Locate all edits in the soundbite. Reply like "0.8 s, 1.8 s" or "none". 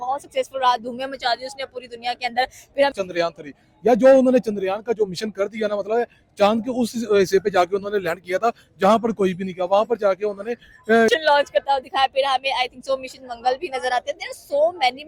2.9 s, 11.1 s